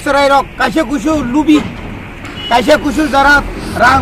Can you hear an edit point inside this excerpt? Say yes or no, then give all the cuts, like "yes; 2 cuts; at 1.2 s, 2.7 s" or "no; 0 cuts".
no; 0 cuts